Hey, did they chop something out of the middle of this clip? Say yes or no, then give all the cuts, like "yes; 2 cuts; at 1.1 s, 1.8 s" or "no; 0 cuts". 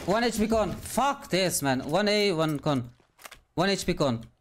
no; 0 cuts